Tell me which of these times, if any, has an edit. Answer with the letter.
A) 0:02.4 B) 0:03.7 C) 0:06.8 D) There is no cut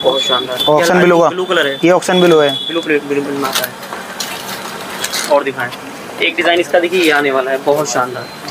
D